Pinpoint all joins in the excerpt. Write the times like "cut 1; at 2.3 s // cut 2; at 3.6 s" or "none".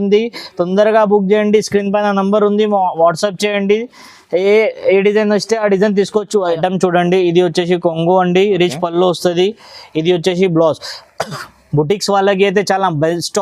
cut 1; at 6.6 s